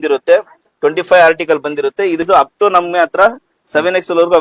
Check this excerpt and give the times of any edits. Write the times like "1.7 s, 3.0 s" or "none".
2.2 s